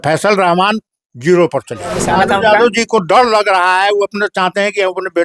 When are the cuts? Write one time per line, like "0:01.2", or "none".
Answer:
0:02.0